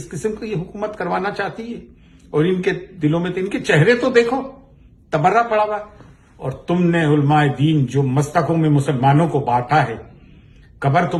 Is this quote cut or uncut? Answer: uncut